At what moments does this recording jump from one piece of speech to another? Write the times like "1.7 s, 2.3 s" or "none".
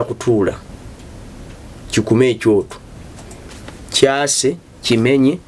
none